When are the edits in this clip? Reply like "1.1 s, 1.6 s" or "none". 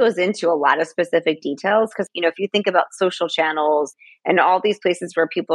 2.1 s, 3.9 s